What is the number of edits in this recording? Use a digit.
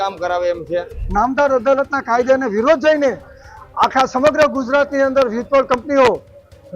1